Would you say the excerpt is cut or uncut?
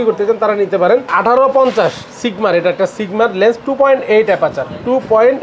cut